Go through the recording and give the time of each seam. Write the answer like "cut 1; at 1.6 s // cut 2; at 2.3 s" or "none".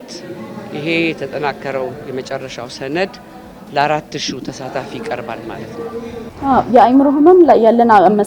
cut 1; at 6.2 s